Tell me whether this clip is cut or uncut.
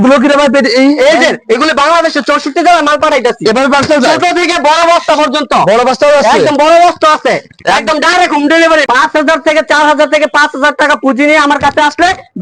cut